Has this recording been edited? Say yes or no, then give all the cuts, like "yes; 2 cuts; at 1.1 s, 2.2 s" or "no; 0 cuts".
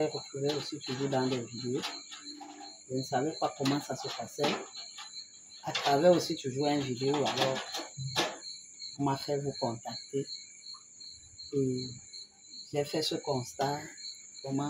no; 0 cuts